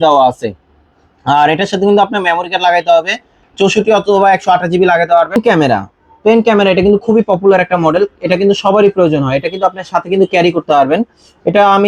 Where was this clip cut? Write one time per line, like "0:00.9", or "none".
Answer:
0:05.4